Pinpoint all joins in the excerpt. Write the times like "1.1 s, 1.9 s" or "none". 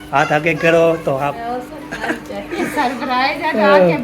1.4 s